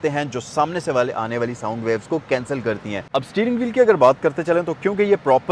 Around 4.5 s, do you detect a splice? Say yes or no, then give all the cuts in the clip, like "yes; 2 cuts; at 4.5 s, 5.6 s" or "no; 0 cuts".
no; 1 cut; at 3.1 s